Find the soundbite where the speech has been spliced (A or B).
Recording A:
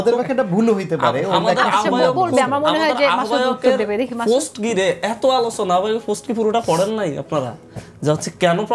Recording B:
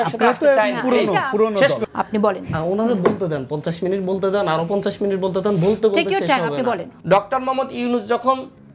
B